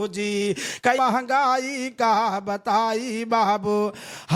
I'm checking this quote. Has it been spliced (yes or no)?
yes